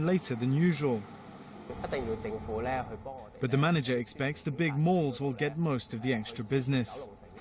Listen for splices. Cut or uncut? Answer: cut